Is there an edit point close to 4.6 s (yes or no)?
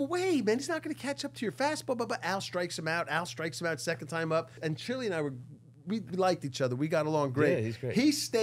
yes